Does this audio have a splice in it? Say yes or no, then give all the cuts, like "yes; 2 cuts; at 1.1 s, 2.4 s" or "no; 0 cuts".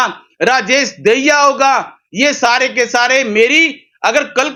no; 0 cuts